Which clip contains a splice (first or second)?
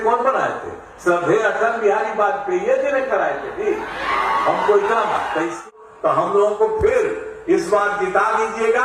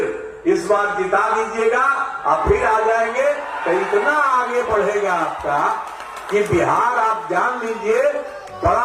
first